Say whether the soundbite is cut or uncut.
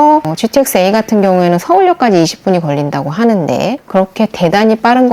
cut